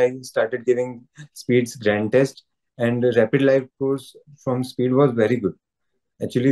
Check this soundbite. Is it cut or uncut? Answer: uncut